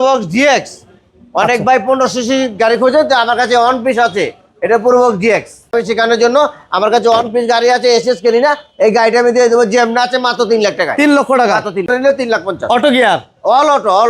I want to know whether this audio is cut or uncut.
cut